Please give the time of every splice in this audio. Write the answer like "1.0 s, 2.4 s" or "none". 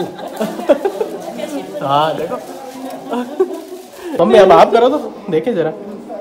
4.1 s